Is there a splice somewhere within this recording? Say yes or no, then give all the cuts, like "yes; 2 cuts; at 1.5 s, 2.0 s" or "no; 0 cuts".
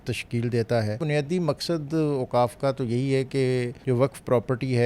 yes; 2 cuts; at 1.0 s, 3.8 s